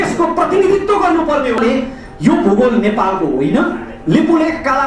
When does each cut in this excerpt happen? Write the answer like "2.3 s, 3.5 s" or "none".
1.6 s